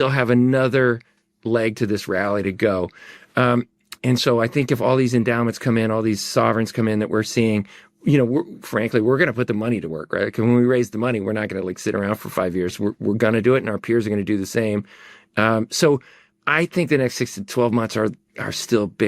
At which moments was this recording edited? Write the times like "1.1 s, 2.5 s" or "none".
none